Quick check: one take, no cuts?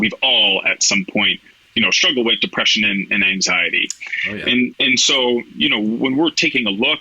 no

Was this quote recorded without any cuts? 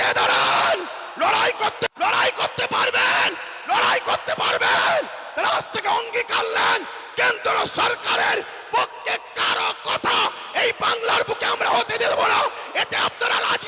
no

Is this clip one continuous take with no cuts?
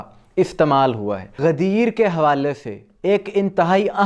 no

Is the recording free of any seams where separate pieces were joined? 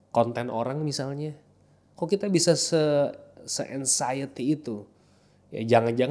yes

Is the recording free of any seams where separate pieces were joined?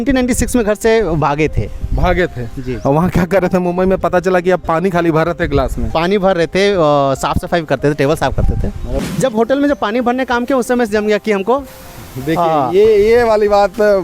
no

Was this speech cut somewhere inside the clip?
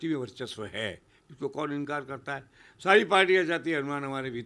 no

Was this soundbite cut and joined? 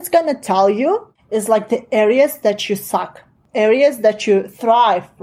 yes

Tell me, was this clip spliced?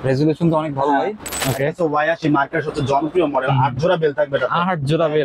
yes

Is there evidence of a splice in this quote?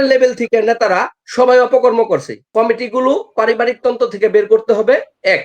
yes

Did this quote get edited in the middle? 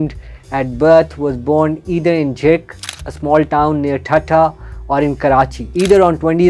no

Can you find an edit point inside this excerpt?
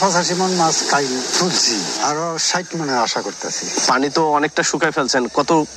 no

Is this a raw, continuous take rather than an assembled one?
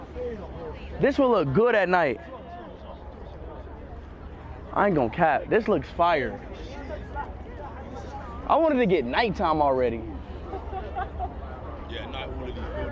no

